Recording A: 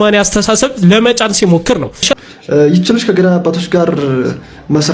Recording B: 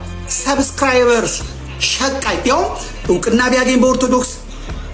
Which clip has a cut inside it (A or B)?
A